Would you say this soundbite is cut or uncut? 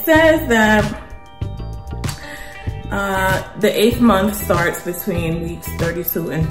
uncut